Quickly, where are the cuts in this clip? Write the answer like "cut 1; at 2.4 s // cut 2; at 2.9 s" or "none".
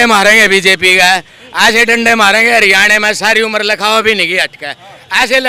none